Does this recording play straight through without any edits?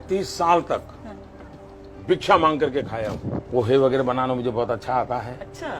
no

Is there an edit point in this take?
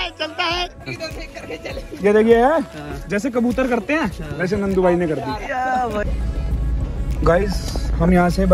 yes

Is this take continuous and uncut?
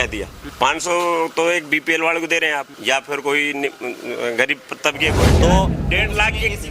no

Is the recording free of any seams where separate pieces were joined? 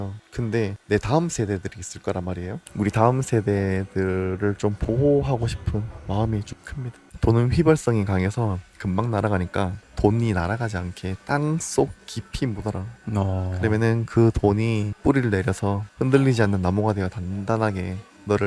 no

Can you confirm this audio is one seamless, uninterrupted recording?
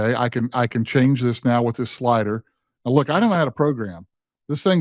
yes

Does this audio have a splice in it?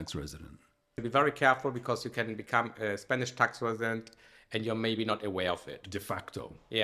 yes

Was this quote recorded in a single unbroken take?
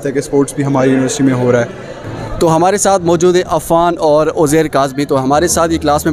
yes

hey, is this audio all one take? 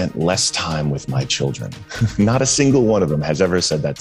yes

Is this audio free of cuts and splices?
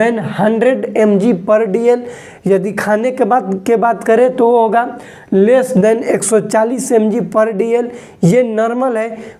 yes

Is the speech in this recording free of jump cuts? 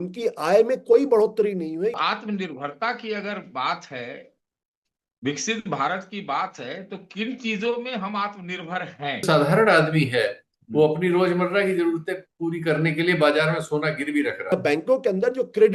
no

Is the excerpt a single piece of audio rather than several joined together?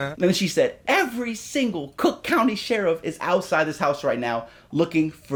yes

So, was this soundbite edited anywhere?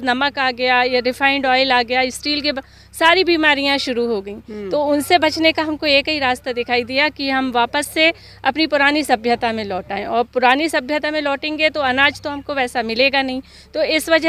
no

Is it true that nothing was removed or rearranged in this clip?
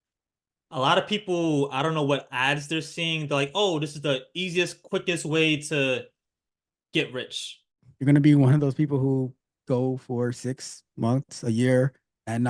no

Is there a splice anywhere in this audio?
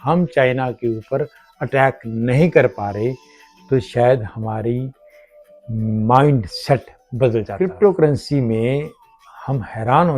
yes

